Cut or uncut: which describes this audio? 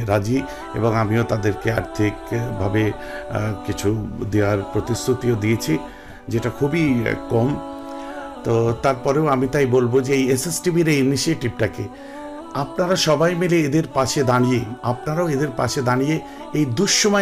cut